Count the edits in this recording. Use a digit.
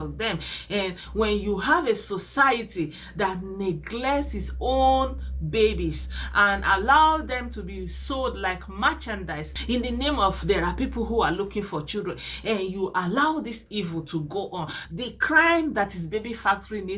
2